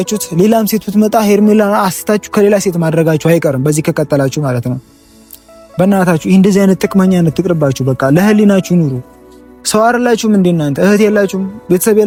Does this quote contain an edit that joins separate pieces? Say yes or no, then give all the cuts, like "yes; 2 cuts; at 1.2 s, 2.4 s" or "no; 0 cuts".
no; 0 cuts